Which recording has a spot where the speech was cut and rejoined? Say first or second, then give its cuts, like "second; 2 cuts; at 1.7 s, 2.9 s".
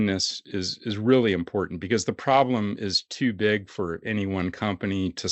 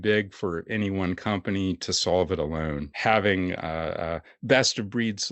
second; 1 cut; at 2.9 s